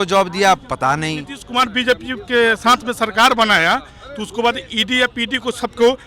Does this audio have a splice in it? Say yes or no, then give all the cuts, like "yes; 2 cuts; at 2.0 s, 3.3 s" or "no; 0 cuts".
yes; 1 cut; at 1.4 s